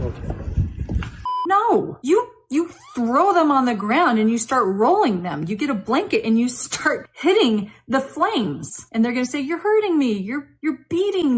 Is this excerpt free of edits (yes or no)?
no